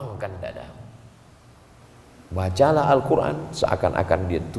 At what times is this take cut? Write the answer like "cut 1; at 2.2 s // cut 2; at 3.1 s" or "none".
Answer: cut 1; at 1.8 s

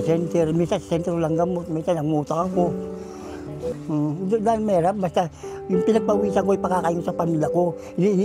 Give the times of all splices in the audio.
cut 1; at 3.7 s

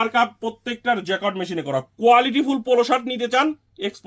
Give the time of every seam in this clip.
none

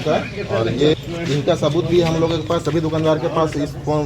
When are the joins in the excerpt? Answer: cut 1; at 1.0 s

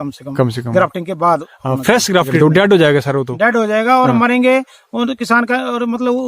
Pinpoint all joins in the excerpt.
cut 1; at 2.4 s

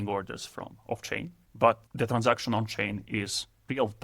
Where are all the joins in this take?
cut 1; at 1.4 s

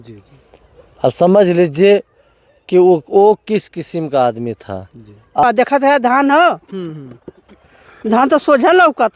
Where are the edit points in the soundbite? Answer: cut 1; at 5.4 s

